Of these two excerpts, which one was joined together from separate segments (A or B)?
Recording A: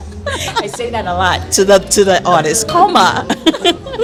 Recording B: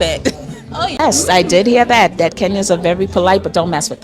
B